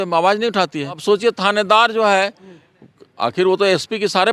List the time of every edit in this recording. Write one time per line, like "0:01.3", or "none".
0:01.0